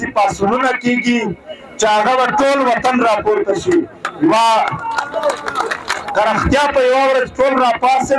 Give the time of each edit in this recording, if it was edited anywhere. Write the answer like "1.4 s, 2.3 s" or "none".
6.0 s